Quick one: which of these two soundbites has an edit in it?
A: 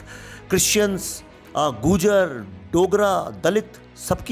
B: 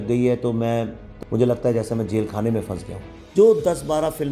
B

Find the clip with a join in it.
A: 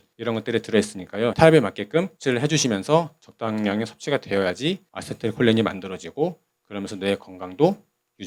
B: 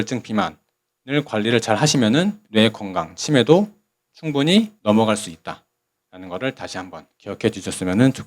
B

